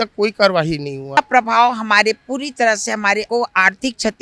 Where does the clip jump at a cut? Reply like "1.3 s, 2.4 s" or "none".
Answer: 1.2 s, 3.3 s